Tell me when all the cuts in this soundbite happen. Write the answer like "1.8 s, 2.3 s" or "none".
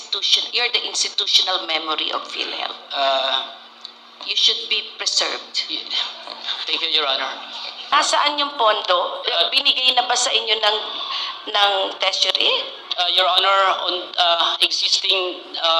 7.9 s